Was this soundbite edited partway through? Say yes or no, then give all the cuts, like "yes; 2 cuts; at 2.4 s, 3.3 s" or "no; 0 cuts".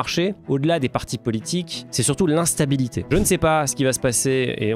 yes; 2 cuts; at 1.8 s, 3.0 s